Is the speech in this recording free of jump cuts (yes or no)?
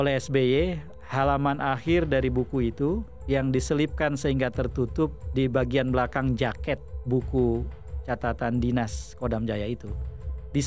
yes